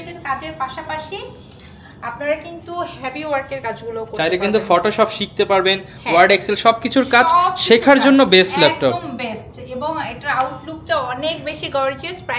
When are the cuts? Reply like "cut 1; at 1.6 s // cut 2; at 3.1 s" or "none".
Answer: none